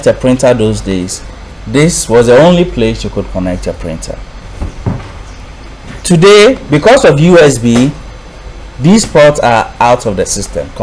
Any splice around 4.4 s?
yes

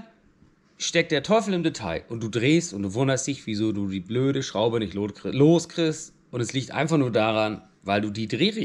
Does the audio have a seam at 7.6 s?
no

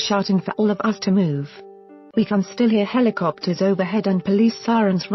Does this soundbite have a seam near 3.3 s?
no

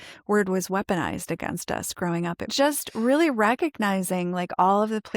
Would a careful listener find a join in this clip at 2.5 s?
yes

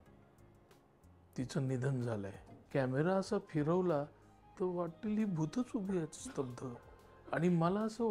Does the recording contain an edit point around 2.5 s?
yes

